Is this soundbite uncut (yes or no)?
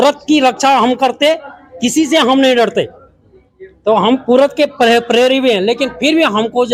yes